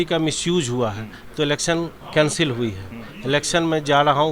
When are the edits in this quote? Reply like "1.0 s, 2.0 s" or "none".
2.0 s